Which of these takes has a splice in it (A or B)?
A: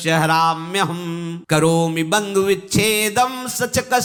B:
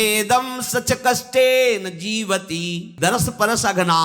B